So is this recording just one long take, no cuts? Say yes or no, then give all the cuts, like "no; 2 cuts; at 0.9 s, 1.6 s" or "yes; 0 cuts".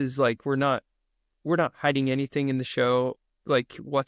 yes; 0 cuts